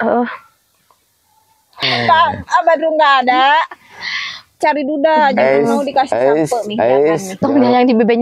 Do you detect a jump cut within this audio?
yes; 1 cut; at 1.8 s

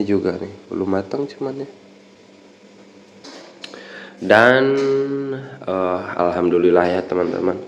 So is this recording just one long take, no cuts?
no; 1 cut; at 3.2 s

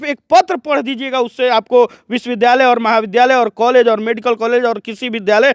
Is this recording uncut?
yes; 0 cuts

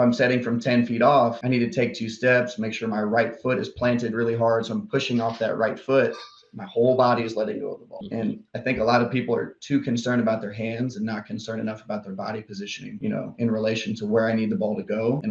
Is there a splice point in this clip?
no; 0 cuts

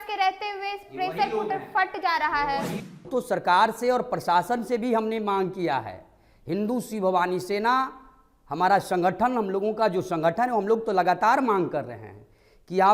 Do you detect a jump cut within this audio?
yes; 1 cut; at 3.0 s

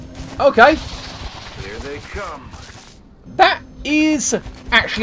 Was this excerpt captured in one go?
yes; 0 cuts

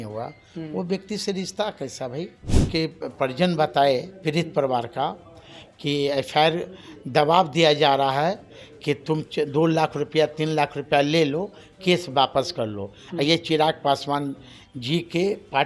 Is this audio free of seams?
no; 1 cut; at 2.5 s

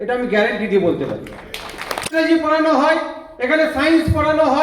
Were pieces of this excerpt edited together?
yes; 1 cut; at 2.1 s

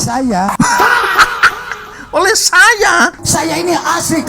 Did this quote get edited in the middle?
yes; 1 cut; at 3.1 s

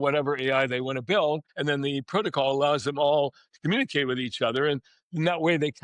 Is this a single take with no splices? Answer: no; 1 cut; at 1.5 s

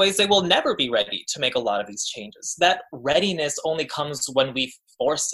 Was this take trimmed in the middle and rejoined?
no; 0 cuts

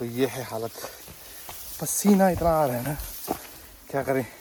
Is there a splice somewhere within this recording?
no; 0 cuts

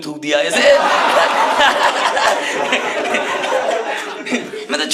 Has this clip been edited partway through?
no; 0 cuts

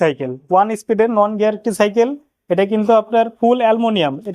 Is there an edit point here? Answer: no; 0 cuts

